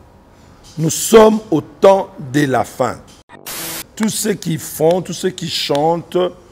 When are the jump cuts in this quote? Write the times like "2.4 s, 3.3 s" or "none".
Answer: 3.7 s

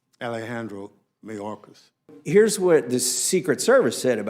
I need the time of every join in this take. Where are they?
2.1 s

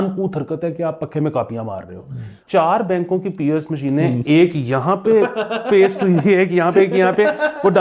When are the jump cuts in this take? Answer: 2.4 s

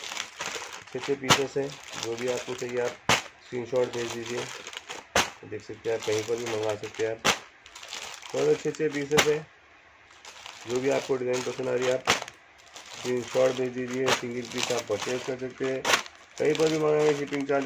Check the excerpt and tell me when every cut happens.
none

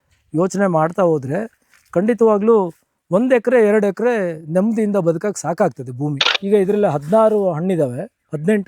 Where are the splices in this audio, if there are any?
6.3 s

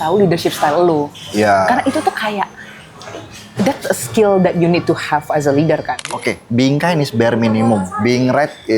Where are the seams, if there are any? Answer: 5.9 s

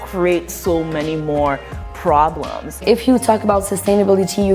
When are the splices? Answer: 2.7 s

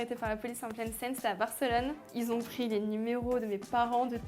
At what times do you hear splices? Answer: 2.1 s

